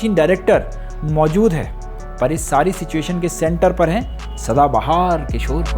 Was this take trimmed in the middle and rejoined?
no; 0 cuts

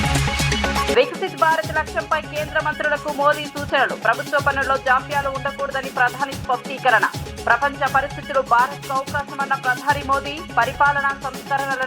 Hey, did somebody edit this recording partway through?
yes; 1 cut; at 0.9 s

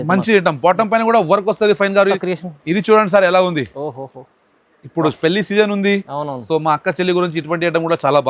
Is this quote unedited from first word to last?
no; 1 cut; at 2.2 s

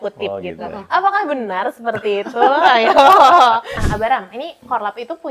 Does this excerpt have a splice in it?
yes; 1 cut; at 3.7 s

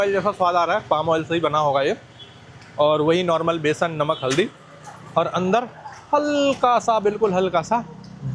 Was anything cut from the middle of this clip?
no; 0 cuts

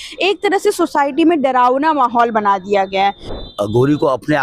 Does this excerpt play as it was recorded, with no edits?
no; 1 cut; at 3.2 s

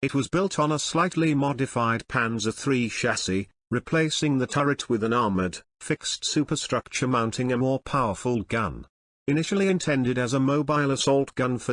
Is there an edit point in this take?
no; 0 cuts

